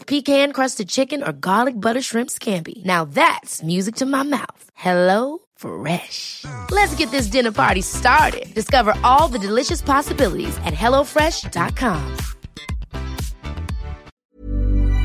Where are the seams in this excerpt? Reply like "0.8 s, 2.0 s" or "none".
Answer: 14.1 s